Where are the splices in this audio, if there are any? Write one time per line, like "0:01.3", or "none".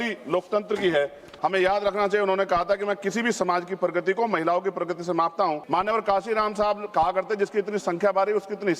0:01.3
0:05.6